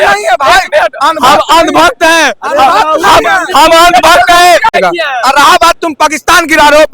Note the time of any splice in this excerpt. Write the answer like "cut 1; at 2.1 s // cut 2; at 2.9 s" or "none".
cut 1; at 4.7 s